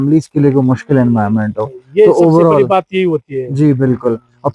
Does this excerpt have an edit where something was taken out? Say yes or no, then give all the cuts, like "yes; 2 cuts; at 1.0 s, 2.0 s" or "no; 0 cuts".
no; 0 cuts